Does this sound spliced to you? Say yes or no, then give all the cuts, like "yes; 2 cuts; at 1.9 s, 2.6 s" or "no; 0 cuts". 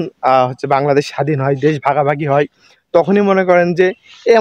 no; 0 cuts